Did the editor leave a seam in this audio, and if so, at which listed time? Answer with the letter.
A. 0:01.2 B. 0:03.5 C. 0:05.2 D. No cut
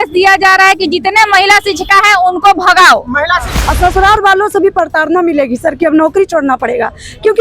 B